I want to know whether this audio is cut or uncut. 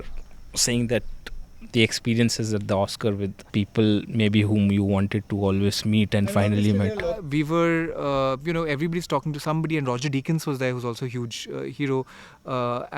cut